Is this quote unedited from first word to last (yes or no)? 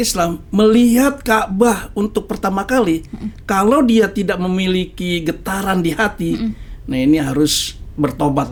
yes